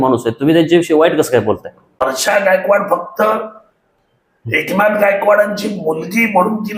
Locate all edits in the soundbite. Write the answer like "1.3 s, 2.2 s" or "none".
2.0 s